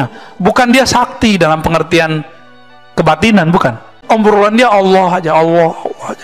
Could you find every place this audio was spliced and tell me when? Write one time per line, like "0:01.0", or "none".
0:03.9